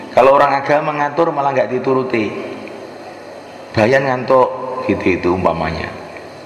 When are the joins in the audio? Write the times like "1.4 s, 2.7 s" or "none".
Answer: 3.5 s